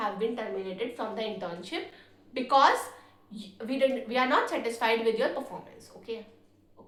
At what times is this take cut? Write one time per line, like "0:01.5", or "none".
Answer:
none